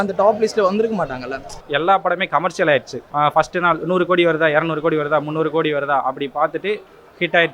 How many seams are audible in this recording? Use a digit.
2